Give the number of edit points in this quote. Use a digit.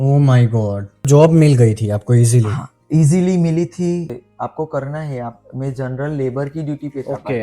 2